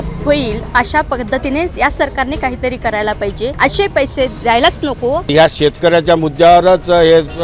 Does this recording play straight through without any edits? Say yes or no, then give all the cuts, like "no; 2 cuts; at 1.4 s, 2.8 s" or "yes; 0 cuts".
no; 2 cuts; at 3.5 s, 5.3 s